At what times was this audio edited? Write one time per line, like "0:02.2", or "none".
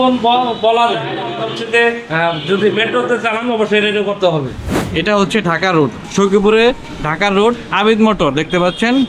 0:04.7